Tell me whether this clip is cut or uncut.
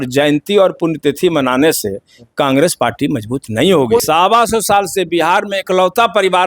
cut